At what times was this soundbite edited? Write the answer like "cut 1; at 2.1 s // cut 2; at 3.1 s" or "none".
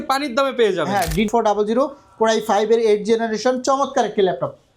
cut 1; at 1.3 s